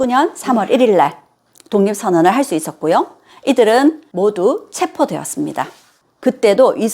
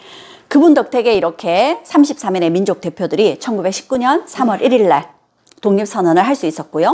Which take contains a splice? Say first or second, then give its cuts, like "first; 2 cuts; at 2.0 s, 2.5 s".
first; 2 cuts; at 4.1 s, 6.0 s